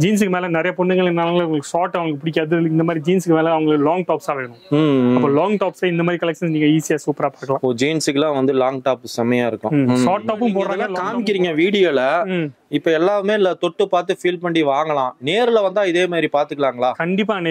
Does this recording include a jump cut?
yes; 1 cut; at 10.9 s

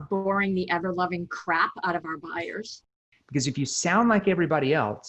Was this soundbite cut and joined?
yes; 1 cut; at 2.9 s

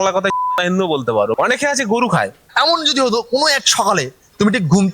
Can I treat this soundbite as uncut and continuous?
no; 2 cuts; at 1.3 s, 2.4 s

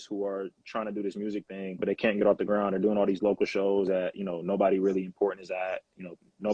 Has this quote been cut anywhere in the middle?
no; 0 cuts

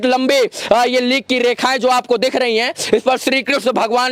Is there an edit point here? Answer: no; 0 cuts

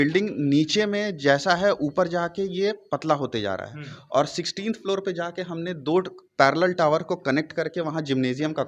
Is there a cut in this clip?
no; 0 cuts

